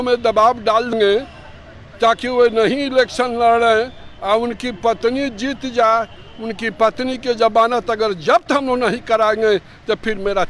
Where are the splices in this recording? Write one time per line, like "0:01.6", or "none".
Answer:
0:00.9